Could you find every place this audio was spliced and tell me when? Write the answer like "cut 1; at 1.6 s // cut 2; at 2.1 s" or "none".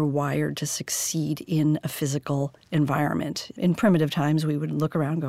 cut 1; at 3.4 s